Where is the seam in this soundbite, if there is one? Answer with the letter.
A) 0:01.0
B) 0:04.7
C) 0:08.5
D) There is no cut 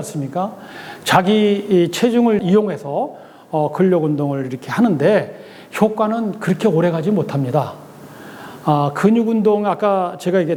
D